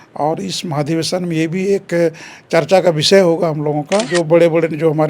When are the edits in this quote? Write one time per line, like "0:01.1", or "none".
0:04.1